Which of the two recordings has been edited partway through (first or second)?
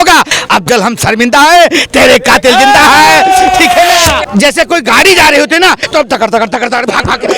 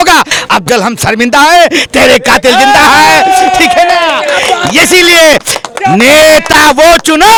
first